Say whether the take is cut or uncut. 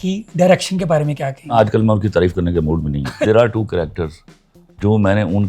cut